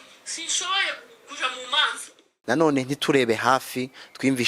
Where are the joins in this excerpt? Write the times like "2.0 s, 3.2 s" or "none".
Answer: 2.3 s